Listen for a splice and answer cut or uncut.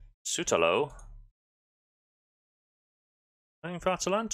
uncut